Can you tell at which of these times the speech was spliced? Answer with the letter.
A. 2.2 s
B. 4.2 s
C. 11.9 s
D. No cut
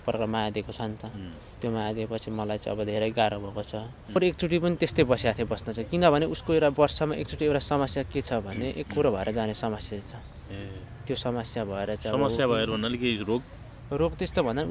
B